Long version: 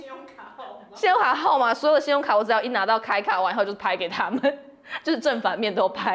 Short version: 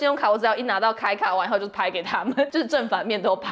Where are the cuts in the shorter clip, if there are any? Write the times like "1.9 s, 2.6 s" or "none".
2.5 s